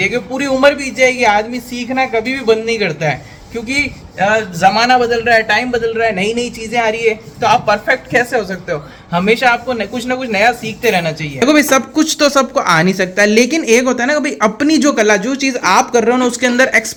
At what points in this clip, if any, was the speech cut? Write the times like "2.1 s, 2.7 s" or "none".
none